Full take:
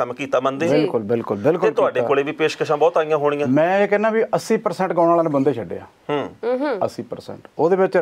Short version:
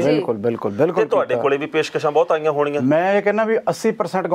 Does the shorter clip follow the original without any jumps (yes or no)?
yes